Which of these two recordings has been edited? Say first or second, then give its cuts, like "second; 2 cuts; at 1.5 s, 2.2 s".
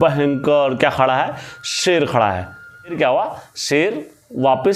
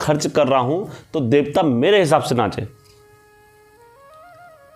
first; 1 cut; at 2.9 s